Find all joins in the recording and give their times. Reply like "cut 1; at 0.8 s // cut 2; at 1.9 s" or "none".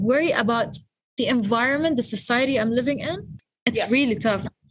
cut 1; at 3.3 s